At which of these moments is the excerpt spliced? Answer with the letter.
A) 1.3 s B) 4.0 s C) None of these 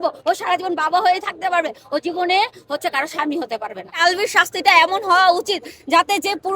B